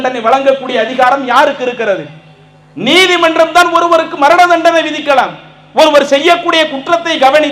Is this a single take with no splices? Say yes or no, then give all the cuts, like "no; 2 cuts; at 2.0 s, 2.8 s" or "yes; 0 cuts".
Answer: yes; 0 cuts